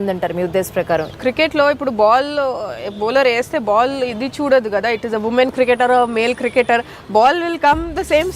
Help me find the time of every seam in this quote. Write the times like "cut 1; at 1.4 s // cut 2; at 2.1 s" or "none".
cut 1; at 1.2 s